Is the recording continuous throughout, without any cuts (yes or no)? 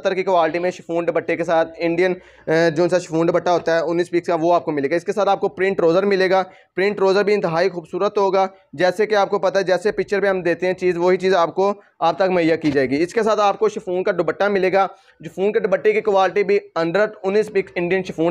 yes